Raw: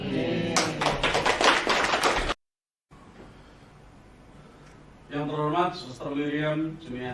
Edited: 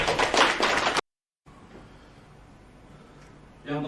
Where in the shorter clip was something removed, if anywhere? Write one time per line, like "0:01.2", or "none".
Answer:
0:01.0